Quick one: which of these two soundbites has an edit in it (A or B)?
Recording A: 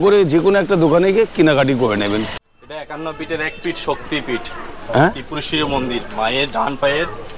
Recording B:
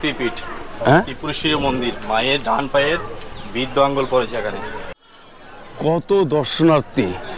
B